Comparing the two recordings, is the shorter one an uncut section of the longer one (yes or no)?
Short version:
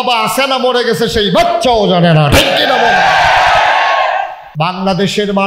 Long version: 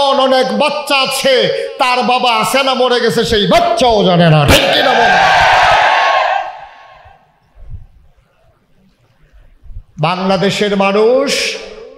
no